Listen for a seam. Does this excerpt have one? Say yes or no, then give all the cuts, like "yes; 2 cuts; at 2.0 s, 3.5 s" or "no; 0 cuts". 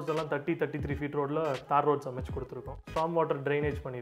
yes; 1 cut; at 2.8 s